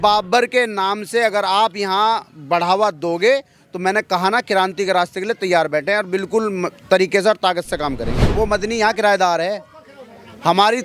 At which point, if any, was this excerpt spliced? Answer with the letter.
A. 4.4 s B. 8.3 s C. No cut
B